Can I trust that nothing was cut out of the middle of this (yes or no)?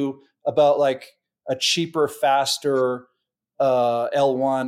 yes